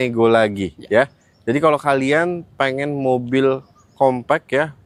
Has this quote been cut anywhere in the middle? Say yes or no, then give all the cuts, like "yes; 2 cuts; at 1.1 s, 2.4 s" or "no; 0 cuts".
no; 0 cuts